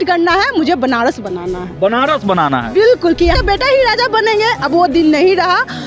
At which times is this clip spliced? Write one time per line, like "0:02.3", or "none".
0:03.4